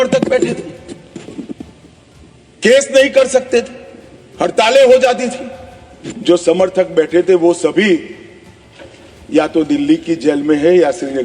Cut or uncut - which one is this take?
uncut